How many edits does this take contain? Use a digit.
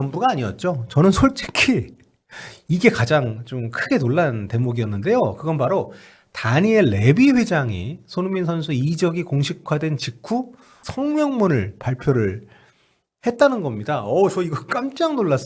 1